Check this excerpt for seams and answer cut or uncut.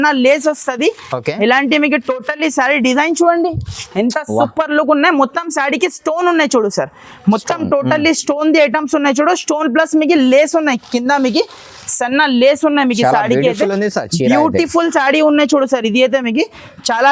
uncut